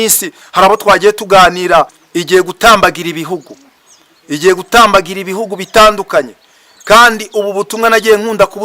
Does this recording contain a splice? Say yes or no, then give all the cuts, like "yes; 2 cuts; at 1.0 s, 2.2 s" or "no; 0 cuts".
yes; 1 cut; at 2.0 s